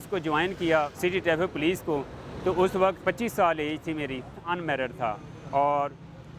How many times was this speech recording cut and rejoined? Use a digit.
3